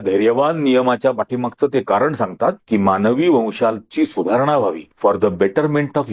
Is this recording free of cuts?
yes; 0 cuts

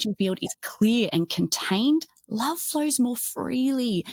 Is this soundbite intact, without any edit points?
yes; 0 cuts

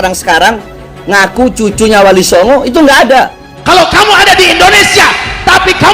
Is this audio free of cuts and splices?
no; 1 cut; at 3.5 s

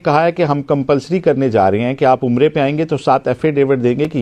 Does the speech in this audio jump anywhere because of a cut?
no; 0 cuts

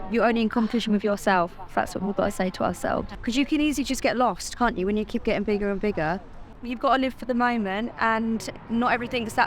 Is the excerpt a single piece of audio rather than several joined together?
no; 2 cuts; at 3.1 s, 6.5 s

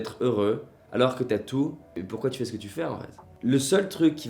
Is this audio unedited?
no; 1 cut; at 3.3 s

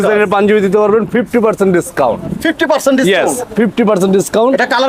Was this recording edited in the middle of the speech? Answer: no; 0 cuts

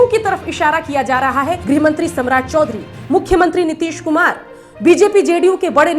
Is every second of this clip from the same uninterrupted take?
no; 1 cut; at 1.6 s

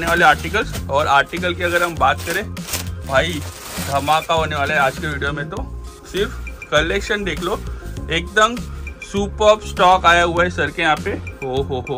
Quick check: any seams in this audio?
no; 0 cuts

